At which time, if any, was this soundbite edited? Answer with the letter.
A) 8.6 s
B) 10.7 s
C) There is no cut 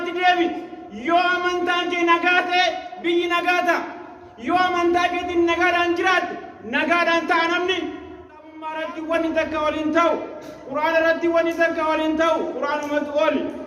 A